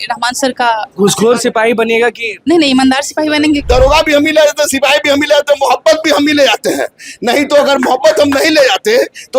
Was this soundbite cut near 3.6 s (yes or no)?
yes